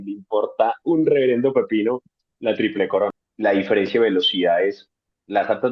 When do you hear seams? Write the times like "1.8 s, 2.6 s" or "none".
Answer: 3.2 s